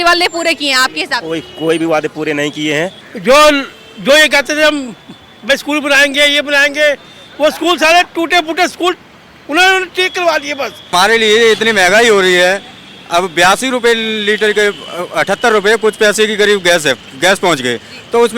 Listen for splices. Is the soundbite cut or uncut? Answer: cut